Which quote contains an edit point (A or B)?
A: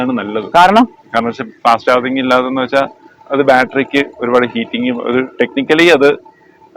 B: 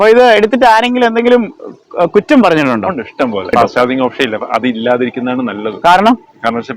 B